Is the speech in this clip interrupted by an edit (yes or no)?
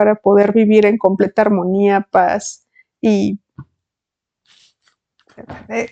no